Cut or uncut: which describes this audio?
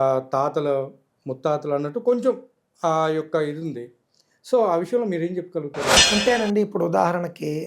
cut